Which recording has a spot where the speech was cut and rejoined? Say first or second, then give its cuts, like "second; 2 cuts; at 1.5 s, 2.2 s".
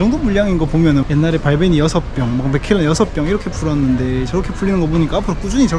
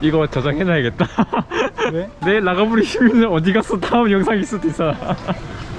first; 1 cut; at 1.0 s